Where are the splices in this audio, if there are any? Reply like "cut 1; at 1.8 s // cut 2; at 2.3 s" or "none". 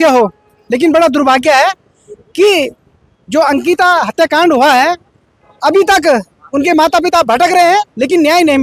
none